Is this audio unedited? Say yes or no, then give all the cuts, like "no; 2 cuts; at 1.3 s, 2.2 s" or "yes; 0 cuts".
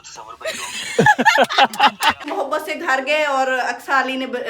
no; 1 cut; at 2.2 s